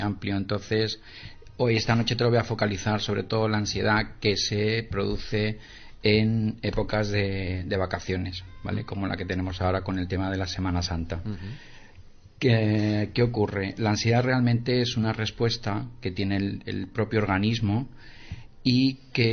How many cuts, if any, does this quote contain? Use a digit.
1